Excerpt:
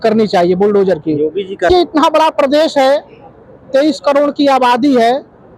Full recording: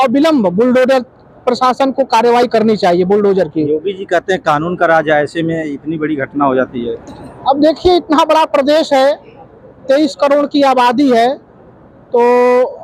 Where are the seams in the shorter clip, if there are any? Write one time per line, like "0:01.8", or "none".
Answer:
0:01.7